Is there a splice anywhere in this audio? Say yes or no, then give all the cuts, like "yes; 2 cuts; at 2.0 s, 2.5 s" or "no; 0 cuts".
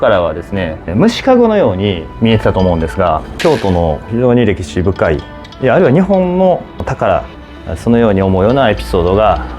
yes; 3 cuts; at 2.1 s, 3.3 s, 6.8 s